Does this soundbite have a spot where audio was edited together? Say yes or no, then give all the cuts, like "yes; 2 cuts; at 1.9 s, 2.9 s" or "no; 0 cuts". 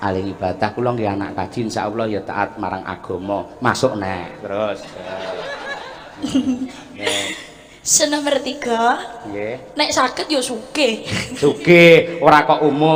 no; 0 cuts